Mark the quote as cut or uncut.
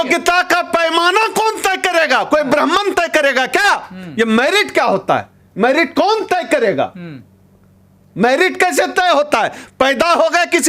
uncut